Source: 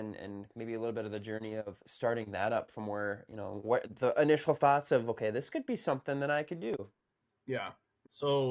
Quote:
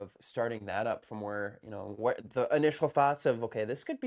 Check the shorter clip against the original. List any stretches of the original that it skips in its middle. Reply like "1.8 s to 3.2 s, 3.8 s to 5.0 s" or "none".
none